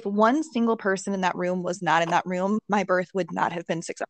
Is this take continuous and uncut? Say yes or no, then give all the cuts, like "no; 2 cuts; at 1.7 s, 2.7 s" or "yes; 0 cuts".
yes; 0 cuts